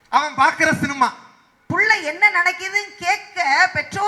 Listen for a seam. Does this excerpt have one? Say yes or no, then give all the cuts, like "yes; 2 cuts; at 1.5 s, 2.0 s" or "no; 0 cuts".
yes; 1 cut; at 1.7 s